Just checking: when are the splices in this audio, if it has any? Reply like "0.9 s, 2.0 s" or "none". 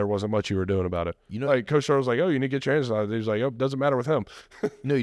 none